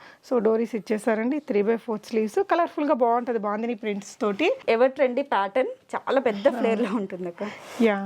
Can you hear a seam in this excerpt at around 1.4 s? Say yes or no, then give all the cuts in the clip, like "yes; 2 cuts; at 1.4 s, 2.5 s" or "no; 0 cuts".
no; 1 cut; at 4.6 s